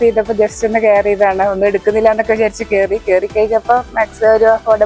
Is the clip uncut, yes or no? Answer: yes